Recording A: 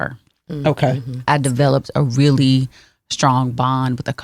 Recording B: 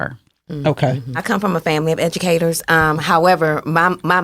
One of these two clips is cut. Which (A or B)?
B